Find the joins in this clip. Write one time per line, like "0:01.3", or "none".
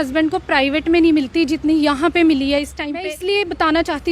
0:03.1